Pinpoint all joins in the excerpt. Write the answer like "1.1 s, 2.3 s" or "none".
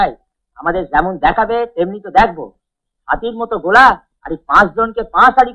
none